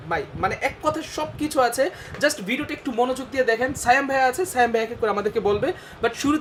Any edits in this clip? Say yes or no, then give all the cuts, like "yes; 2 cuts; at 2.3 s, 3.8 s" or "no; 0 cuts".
no; 0 cuts